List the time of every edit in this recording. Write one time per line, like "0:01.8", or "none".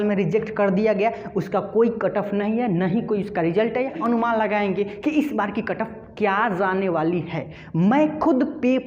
0:04.0